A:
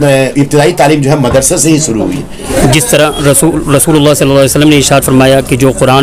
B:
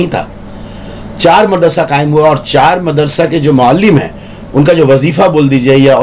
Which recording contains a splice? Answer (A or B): A